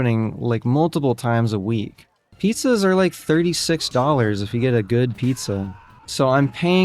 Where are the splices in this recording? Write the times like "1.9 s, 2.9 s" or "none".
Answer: 2.3 s